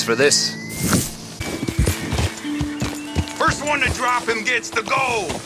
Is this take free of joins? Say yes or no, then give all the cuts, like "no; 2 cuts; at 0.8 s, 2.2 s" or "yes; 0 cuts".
no; 1 cut; at 1.5 s